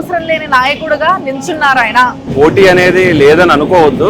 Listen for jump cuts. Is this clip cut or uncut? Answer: cut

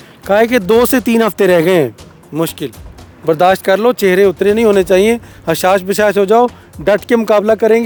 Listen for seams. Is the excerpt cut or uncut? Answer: uncut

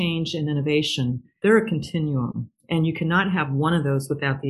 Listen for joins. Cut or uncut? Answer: cut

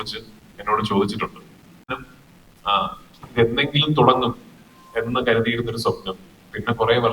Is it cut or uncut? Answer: cut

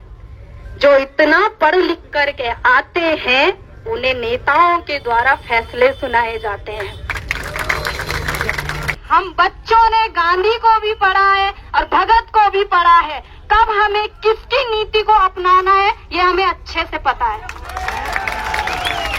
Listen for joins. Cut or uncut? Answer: cut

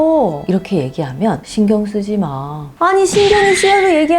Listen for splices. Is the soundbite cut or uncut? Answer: cut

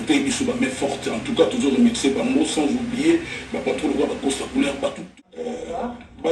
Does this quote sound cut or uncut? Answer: cut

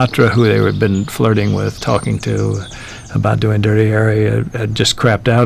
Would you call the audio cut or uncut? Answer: uncut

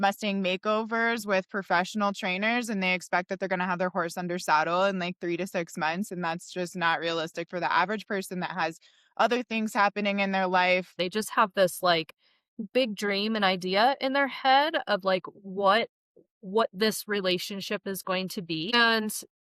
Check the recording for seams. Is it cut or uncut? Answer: cut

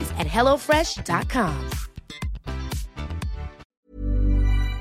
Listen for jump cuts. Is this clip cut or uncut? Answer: cut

